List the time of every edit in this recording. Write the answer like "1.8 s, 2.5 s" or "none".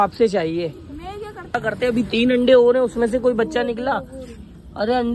1.6 s